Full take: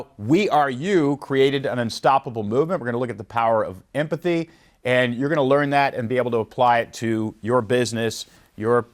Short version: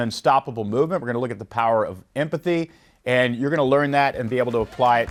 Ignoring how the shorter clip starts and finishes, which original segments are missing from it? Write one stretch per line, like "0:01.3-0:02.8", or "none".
none